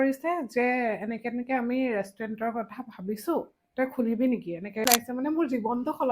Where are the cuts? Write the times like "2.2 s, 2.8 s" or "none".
4.8 s